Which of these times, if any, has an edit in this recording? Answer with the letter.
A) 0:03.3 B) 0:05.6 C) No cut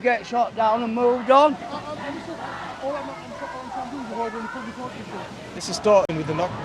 B